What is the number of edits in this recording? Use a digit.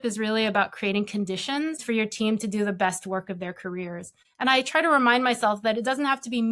2